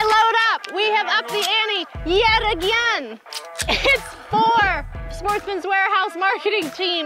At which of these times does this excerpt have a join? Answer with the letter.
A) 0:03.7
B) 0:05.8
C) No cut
A